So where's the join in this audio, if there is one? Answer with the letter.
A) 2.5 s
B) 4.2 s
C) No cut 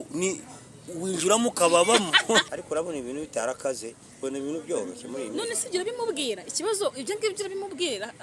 A